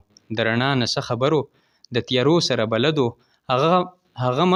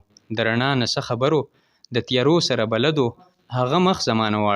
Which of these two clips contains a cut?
second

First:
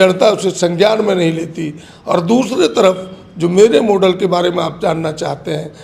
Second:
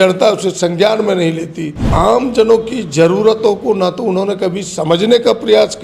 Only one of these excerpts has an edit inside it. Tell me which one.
second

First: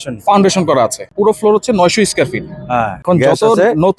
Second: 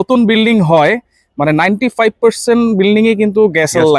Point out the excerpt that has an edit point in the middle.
first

